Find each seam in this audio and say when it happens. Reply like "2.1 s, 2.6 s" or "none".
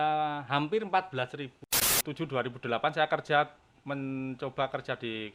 1.9 s